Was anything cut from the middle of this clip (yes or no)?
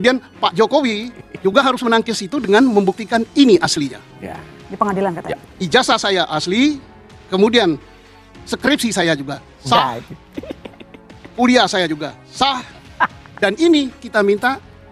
no